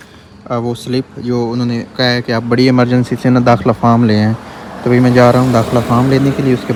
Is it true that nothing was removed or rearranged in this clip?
yes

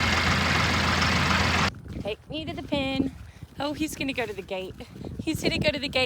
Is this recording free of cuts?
no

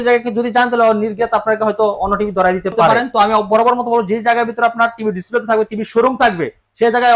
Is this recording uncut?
no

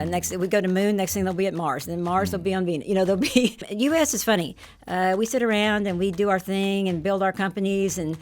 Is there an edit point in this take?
yes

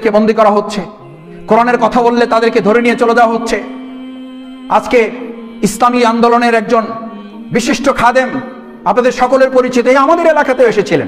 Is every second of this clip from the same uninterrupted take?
yes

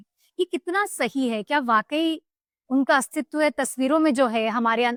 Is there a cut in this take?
no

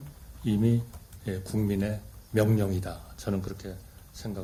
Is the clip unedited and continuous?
yes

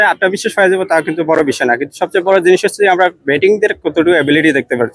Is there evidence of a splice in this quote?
no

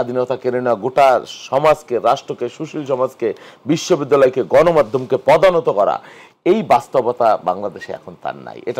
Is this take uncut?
yes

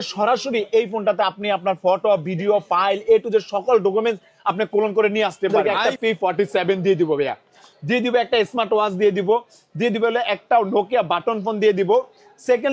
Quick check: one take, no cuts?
no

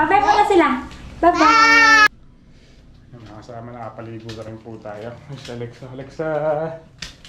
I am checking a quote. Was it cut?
yes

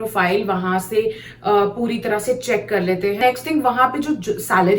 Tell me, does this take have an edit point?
yes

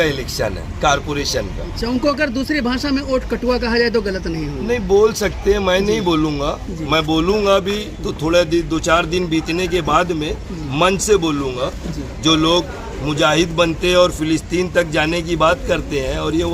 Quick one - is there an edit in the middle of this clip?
no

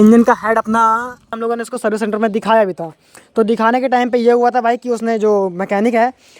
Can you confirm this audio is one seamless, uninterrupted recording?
no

